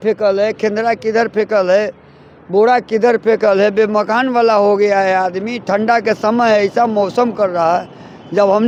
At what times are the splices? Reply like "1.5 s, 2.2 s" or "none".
none